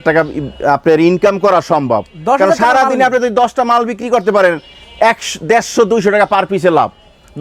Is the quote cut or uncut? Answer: uncut